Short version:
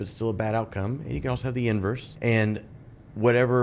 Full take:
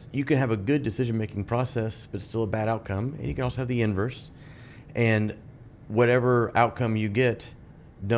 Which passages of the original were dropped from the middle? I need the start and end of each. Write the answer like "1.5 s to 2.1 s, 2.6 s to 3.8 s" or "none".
4.2 s to 4.8 s